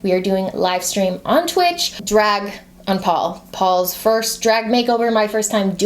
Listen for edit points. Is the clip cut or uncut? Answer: cut